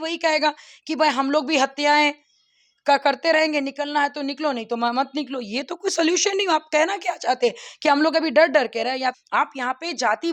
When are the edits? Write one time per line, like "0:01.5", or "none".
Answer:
0:09.2